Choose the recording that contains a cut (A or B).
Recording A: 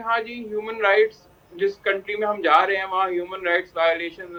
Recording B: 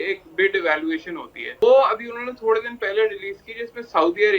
B